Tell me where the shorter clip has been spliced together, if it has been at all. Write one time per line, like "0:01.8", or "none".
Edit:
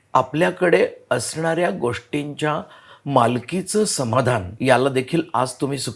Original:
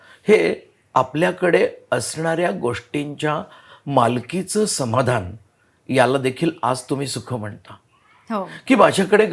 0:04.5